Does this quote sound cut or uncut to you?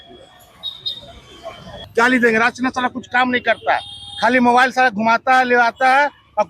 cut